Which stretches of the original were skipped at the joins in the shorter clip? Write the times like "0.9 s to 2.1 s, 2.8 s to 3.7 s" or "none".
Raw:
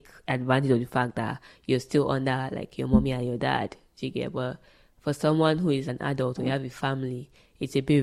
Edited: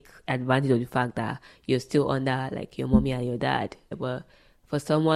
3.9 s to 4.3 s